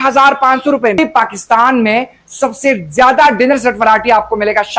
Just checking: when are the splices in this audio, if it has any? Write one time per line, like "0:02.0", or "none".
0:01.0